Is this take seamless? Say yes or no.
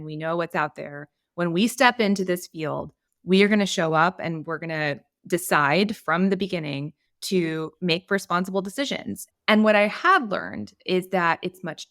no